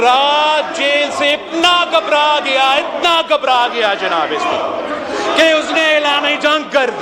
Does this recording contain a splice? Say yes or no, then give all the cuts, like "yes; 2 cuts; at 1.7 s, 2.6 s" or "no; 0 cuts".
no; 0 cuts